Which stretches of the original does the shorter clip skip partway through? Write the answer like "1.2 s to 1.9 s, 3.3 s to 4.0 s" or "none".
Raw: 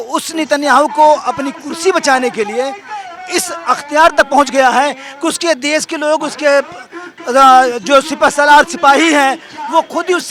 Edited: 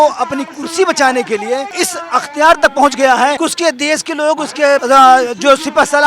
2.8 s to 3.2 s, 4.9 s to 5.2 s, 6.7 s to 7.3 s